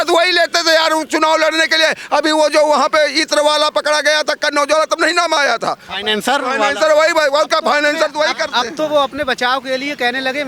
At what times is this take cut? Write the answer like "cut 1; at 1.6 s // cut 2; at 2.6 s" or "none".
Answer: none